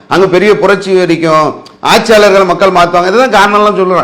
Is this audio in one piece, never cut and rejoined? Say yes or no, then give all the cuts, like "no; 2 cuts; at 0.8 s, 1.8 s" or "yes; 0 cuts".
yes; 0 cuts